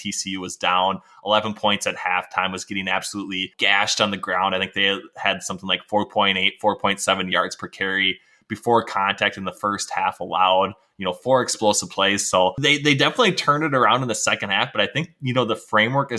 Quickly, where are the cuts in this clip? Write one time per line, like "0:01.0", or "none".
0:03.5
0:12.6